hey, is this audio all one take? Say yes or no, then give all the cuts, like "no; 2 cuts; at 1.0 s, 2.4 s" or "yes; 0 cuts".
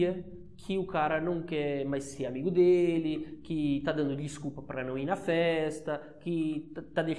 yes; 0 cuts